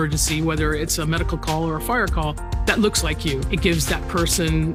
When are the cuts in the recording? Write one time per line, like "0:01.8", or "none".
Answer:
none